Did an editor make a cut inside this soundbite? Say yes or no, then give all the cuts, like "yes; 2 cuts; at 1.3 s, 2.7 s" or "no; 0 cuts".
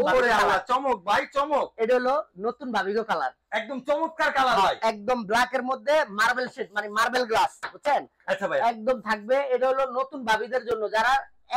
no; 0 cuts